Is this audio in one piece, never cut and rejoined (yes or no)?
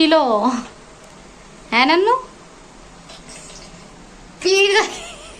yes